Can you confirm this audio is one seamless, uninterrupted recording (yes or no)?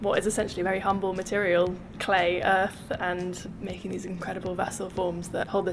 yes